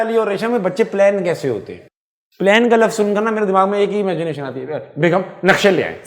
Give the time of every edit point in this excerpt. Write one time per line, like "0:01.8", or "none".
none